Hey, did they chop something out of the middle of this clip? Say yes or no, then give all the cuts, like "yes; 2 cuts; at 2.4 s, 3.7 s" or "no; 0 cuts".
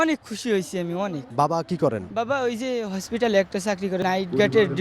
yes; 3 cuts; at 1.2 s, 2.1 s, 4.0 s